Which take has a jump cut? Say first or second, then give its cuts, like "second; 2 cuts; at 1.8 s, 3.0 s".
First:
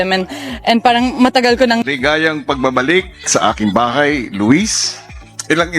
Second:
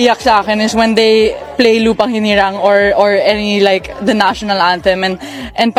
first; 1 cut; at 1.8 s